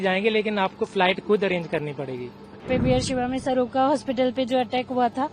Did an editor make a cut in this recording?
yes; 1 cut; at 2.6 s

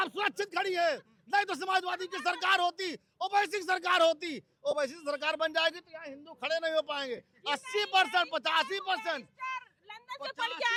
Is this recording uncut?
yes; 0 cuts

